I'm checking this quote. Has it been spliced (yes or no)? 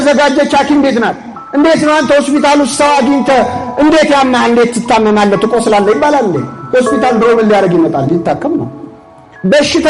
no